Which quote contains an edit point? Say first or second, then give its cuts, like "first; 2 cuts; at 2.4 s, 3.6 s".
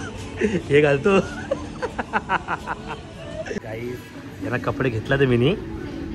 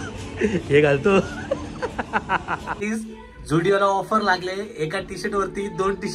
second; 1 cut; at 2.8 s